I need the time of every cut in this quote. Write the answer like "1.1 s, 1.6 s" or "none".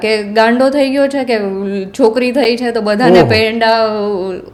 none